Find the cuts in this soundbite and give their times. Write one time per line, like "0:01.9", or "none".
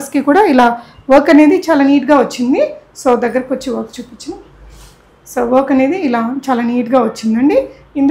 none